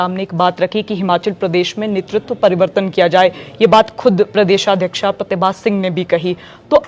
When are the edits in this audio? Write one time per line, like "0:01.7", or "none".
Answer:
none